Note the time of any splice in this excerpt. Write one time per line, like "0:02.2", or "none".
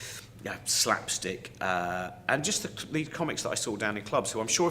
0:02.2